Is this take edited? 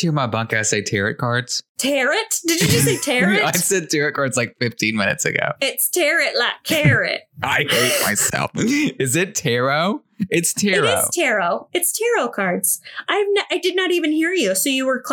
yes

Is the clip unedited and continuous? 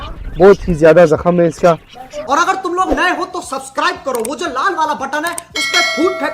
no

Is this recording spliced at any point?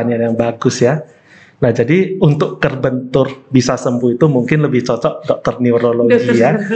no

